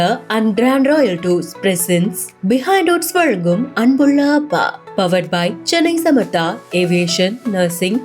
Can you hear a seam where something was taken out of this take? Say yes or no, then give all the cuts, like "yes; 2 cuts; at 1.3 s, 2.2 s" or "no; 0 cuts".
no; 0 cuts